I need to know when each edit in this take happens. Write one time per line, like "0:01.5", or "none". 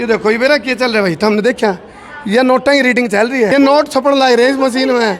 0:03.5